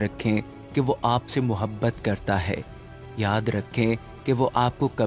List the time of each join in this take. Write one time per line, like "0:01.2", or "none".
none